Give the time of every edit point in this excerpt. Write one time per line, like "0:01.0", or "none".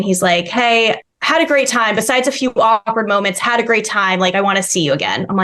0:01.1